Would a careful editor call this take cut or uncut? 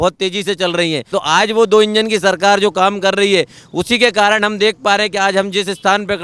cut